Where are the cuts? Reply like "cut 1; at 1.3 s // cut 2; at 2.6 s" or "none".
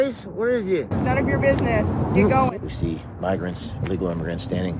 cut 1; at 2.6 s